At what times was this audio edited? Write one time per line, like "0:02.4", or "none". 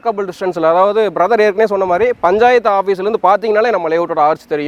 none